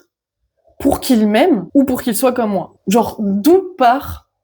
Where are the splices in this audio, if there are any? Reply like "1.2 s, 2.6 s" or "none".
2.7 s